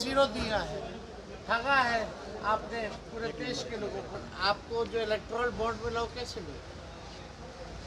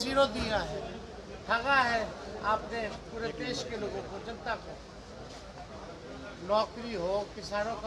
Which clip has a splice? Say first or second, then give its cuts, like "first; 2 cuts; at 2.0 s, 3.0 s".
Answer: first; 1 cut; at 4.2 s